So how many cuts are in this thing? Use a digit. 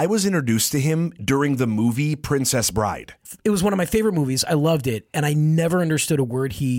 1